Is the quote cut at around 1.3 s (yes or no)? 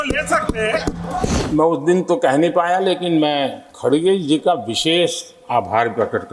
yes